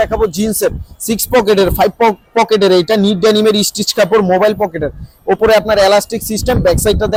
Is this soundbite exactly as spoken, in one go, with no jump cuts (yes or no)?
yes